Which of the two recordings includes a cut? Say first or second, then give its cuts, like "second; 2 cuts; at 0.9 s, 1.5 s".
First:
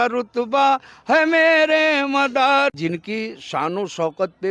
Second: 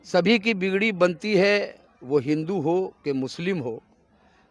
first; 1 cut; at 2.8 s